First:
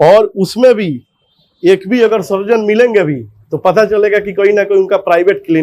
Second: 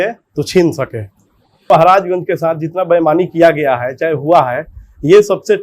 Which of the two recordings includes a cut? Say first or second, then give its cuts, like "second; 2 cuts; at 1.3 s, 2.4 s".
second; 1 cut; at 1.7 s